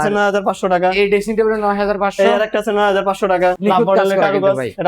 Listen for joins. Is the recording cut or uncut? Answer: cut